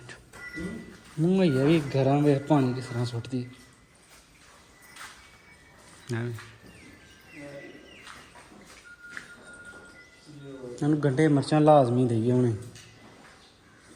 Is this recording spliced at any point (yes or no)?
no